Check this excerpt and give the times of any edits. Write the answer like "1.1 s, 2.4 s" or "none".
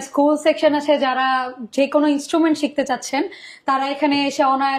none